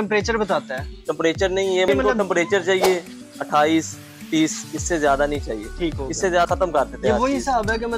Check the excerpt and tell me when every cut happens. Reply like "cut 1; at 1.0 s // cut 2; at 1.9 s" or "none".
cut 1; at 1.9 s // cut 2; at 6.5 s